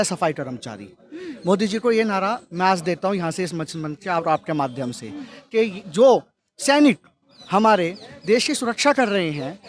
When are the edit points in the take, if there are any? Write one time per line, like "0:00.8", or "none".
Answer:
none